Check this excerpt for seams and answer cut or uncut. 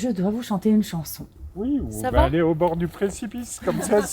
cut